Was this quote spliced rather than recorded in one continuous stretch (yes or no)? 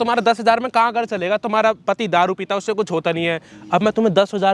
no